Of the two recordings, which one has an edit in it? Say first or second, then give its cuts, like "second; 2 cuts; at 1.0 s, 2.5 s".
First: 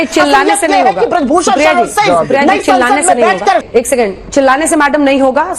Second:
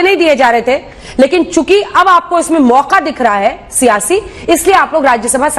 first; 1 cut; at 3.6 s